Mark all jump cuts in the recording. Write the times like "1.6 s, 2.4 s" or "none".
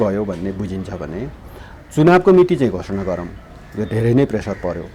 none